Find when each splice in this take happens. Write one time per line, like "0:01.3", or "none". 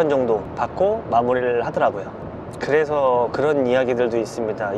0:02.1